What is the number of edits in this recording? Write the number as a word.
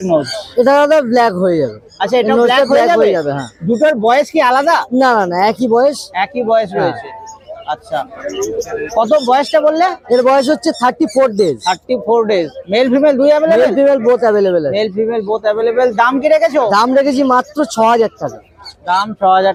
zero